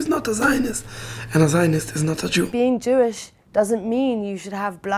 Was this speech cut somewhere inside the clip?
yes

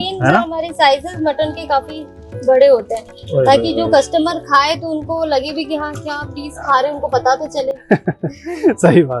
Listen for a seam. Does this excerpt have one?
no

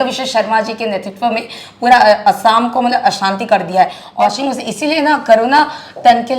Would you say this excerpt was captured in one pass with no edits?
no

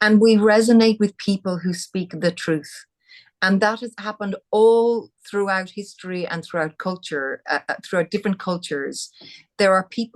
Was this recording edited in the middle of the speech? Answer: no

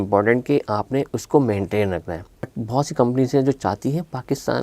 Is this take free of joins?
no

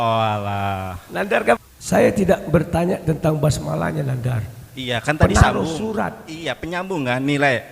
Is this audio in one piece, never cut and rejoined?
no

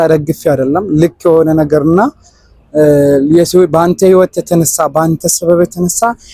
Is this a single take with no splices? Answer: yes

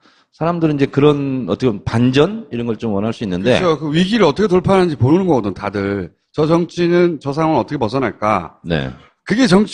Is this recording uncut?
yes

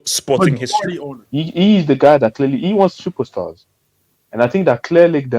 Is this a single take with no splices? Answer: no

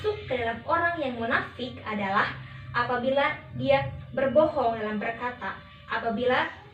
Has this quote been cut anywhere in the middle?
no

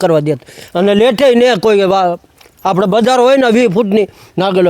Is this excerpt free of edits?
yes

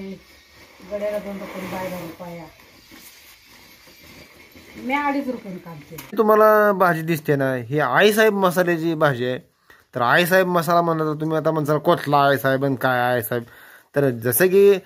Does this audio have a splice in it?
yes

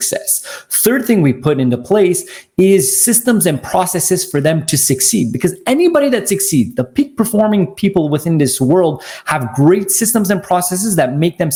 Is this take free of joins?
yes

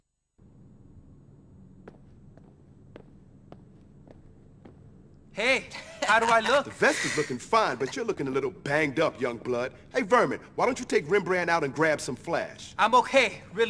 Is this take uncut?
yes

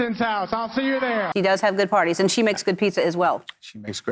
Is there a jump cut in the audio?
yes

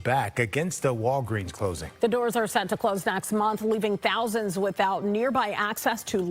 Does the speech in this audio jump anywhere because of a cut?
no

